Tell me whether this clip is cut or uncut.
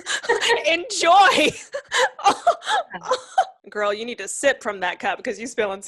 cut